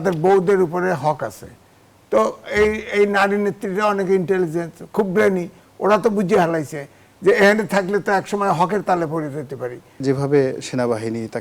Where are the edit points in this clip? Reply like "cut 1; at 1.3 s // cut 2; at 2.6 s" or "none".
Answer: cut 1; at 10.0 s